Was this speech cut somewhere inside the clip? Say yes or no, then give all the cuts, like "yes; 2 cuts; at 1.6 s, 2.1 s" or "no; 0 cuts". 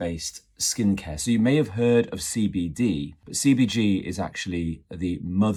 no; 0 cuts